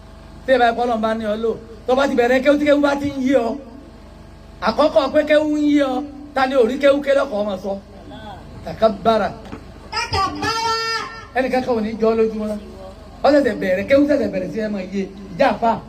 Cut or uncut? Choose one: uncut